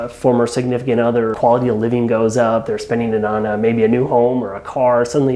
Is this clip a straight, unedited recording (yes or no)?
no